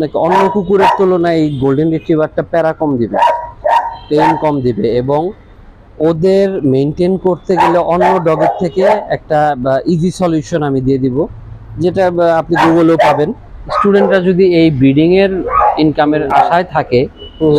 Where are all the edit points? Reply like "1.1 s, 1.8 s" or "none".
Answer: 13.6 s